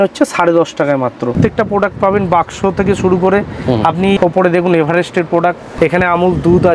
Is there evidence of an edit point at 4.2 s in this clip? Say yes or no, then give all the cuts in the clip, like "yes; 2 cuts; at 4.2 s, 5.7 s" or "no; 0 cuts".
yes; 3 cuts; at 1.4 s, 4.2 s, 5.7 s